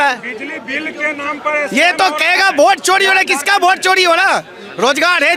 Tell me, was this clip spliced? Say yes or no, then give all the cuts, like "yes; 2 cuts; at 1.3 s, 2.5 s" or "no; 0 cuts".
no; 0 cuts